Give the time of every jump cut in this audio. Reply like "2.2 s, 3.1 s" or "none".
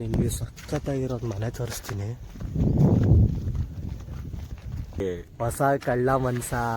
5.0 s